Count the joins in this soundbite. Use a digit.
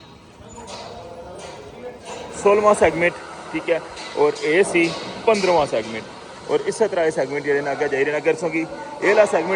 1